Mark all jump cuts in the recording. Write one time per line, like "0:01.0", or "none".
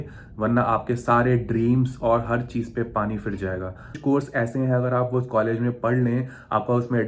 0:04.0